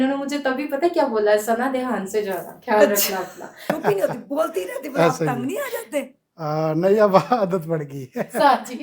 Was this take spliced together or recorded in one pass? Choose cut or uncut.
cut